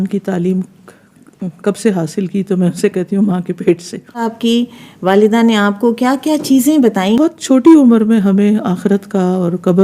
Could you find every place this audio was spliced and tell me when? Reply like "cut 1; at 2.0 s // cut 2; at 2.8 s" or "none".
cut 1; at 4.2 s // cut 2; at 7.2 s